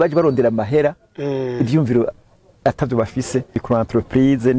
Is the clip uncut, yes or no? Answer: no